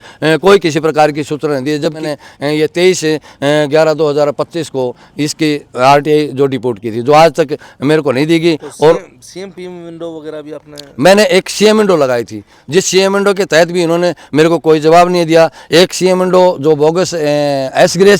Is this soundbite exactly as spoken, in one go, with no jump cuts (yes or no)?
yes